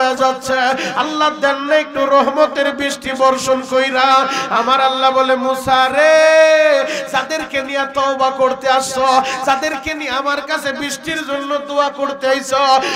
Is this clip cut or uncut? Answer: uncut